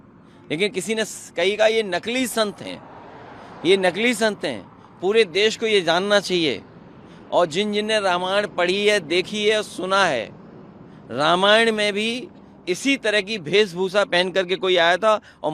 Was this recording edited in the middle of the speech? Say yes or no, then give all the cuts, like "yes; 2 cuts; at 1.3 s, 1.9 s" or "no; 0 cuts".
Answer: no; 0 cuts